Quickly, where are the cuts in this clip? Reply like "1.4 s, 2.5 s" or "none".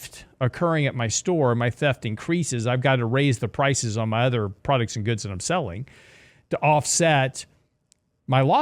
4.6 s